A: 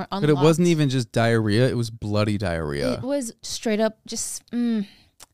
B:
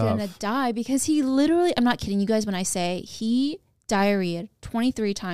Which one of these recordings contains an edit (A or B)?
A